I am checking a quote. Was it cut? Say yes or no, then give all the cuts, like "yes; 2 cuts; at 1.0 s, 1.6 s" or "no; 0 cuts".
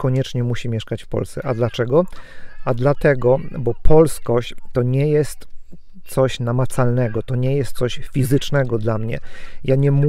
no; 0 cuts